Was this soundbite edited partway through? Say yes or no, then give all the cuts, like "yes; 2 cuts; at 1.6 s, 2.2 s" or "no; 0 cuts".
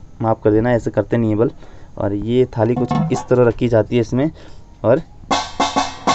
no; 0 cuts